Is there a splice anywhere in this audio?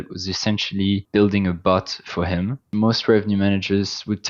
yes; 2 cuts; at 1.0 s, 2.7 s

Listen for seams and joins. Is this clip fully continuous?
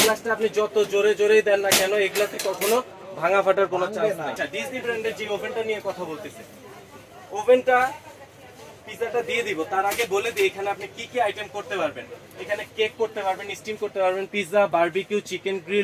no; 1 cut; at 4.4 s

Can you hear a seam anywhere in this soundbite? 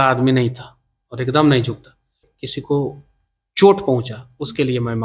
yes; 1 cut; at 2.2 s

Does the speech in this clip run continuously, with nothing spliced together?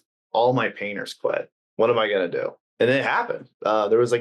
no; 2 cuts; at 1.6 s, 2.6 s

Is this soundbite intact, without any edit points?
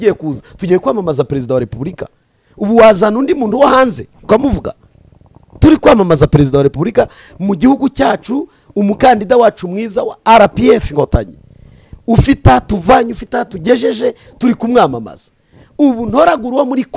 yes; 0 cuts

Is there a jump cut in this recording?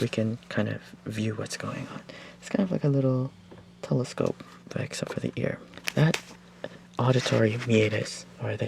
yes; 1 cut; at 5.6 s

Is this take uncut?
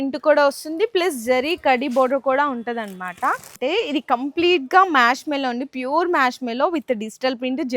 no; 1 cut; at 3.5 s

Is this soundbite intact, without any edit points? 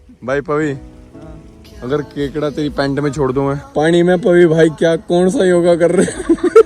no; 1 cut; at 3.6 s

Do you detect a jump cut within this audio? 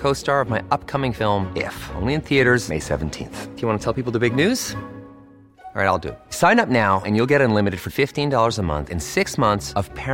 no; 0 cuts

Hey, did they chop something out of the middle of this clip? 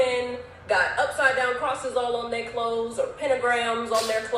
no; 0 cuts

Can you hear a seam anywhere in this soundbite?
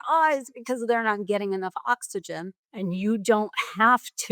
yes; 1 cut; at 2.6 s

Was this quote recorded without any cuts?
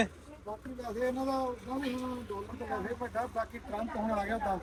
yes; 0 cuts

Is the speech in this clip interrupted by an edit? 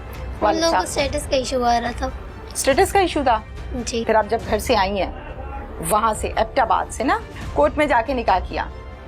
yes; 2 cuts; at 4.0 s, 7.3 s

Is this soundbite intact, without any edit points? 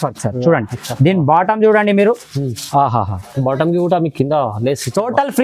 yes; 0 cuts

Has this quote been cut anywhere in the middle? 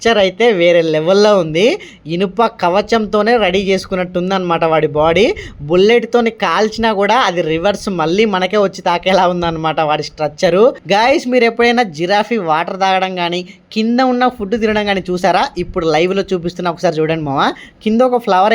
yes; 1 cut; at 10.8 s

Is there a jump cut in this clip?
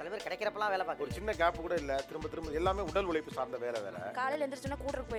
no; 0 cuts

